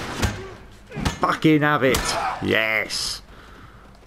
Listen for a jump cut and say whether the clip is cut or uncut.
uncut